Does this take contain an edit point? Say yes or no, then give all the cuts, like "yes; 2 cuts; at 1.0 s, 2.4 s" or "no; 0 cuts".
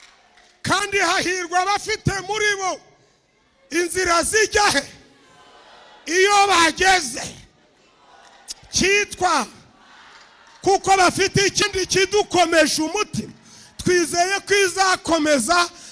yes; 1 cut; at 11.6 s